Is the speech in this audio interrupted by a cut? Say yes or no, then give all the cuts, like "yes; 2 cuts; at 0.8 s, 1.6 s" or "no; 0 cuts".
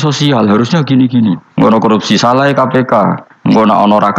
yes; 2 cuts; at 1.7 s, 3.2 s